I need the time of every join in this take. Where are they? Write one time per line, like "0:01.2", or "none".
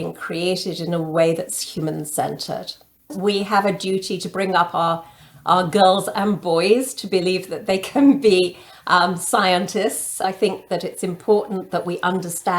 0:03.1
0:10.2